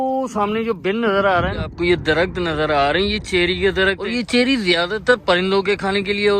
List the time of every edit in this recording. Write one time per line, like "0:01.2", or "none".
0:01.7
0:04.2